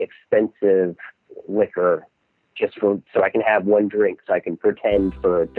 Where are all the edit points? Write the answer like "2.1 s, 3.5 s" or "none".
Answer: none